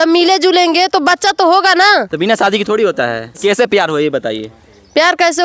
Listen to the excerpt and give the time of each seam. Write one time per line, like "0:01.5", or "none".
0:03.4